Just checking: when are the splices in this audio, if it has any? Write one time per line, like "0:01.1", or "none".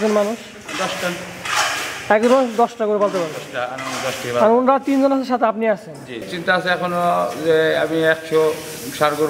0:06.3